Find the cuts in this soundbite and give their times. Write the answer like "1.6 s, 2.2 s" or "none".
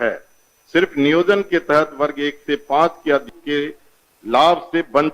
3.3 s